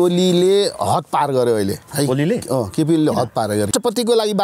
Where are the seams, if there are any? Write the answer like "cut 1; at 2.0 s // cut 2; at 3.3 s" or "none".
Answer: cut 1; at 1.8 s // cut 2; at 3.7 s